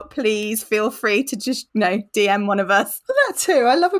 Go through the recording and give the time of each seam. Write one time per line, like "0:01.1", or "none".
0:01.6
0:03.0